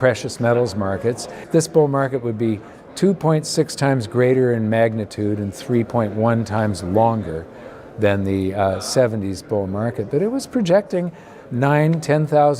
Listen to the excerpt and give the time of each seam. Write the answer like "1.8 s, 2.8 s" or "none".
1.3 s

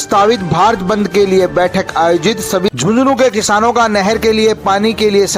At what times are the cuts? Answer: 2.7 s

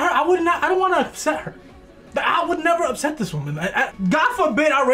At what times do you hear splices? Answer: 3.9 s

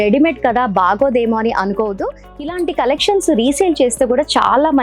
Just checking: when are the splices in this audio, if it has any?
2.3 s

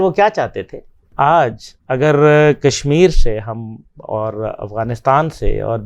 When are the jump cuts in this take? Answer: 1.0 s

